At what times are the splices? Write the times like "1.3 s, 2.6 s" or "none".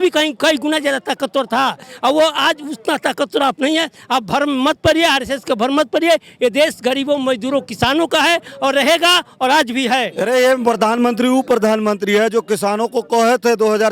10.1 s